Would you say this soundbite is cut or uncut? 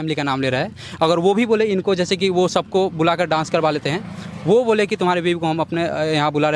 uncut